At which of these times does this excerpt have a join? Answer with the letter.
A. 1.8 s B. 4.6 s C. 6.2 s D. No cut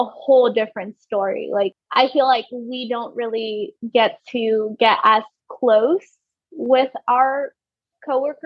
A